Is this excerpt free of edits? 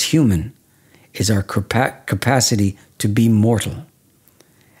yes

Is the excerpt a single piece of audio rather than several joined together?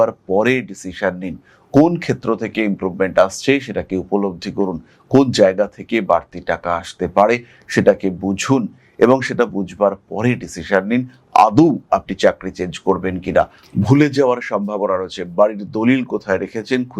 no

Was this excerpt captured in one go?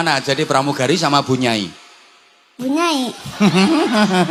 yes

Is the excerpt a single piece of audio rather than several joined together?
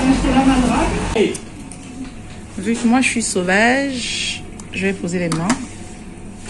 no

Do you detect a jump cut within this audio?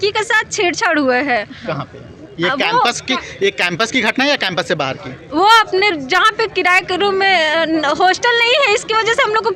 no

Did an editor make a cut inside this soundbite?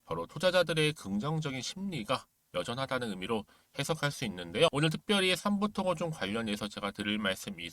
yes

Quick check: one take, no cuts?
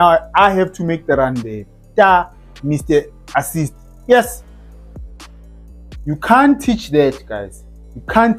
yes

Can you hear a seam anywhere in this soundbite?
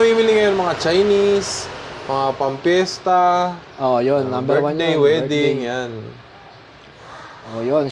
no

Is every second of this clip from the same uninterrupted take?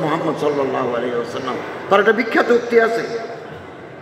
yes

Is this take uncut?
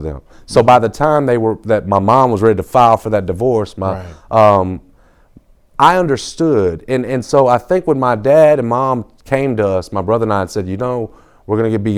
yes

